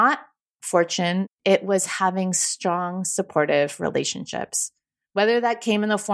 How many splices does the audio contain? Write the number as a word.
one